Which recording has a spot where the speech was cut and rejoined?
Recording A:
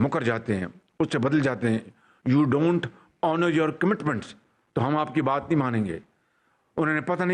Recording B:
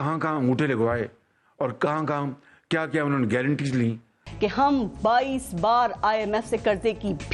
B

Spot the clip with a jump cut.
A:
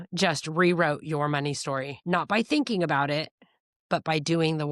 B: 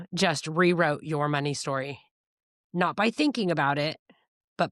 A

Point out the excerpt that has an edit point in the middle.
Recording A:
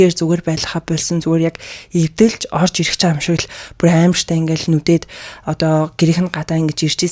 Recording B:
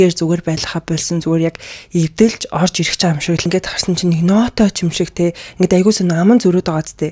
B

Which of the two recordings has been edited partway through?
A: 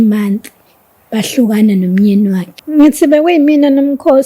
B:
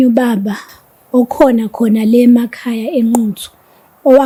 A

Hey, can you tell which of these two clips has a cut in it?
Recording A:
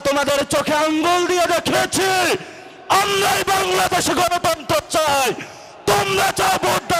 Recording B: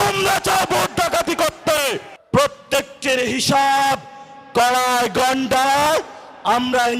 B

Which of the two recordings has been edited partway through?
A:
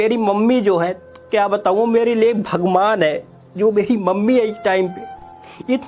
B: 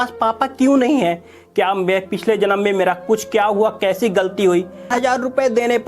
B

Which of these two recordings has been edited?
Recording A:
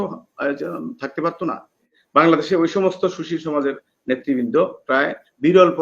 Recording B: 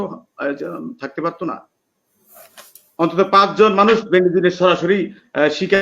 A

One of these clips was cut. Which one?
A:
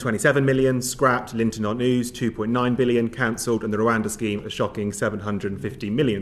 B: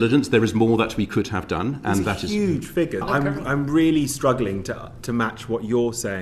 B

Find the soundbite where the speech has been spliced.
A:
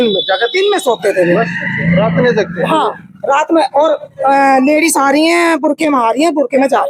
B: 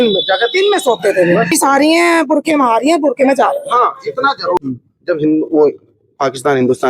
B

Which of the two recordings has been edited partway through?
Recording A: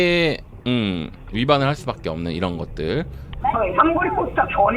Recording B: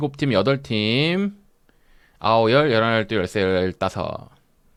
A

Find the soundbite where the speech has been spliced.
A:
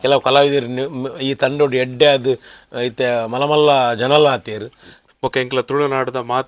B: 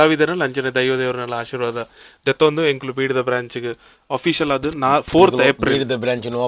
A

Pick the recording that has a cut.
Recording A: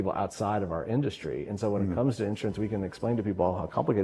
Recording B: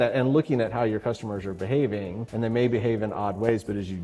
B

